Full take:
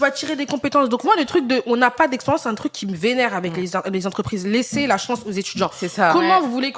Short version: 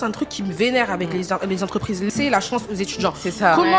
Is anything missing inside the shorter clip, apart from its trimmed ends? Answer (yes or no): yes